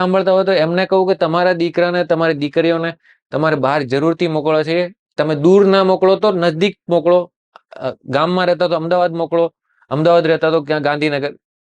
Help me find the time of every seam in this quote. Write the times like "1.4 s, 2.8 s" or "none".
none